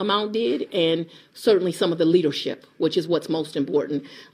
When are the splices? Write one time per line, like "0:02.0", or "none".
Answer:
none